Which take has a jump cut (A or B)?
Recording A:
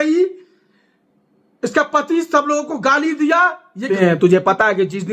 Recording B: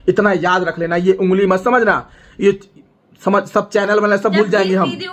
A